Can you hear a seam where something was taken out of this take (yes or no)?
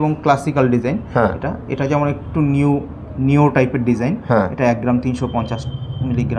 no